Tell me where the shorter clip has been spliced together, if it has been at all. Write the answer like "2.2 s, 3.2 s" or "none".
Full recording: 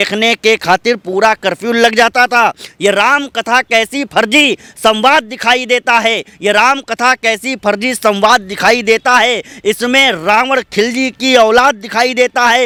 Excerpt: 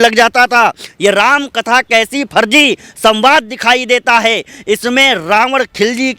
4.5 s